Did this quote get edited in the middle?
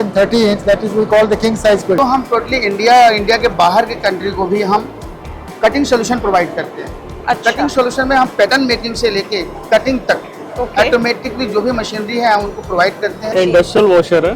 yes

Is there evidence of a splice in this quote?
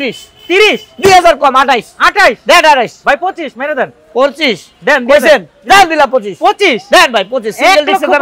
no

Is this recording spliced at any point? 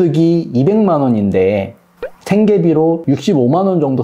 no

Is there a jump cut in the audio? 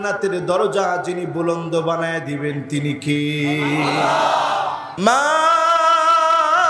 yes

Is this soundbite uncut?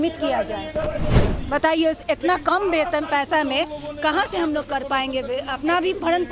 no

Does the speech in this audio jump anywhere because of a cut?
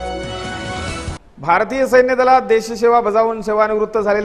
yes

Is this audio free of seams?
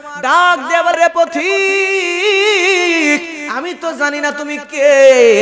no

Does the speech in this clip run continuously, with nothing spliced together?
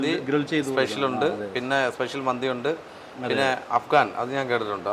yes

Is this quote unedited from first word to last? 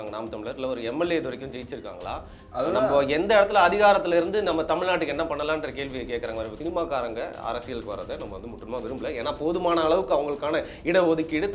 no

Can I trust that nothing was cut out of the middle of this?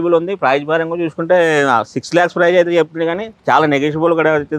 yes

